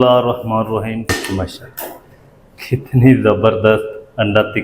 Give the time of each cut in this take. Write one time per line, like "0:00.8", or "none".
0:01.1